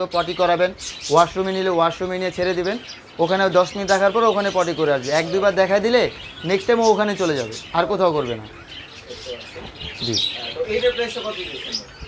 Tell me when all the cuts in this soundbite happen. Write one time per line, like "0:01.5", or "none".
none